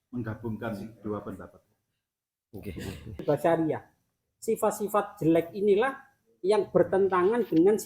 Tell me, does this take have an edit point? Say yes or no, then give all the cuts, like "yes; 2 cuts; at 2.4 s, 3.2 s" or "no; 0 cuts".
yes; 1 cut; at 3.2 s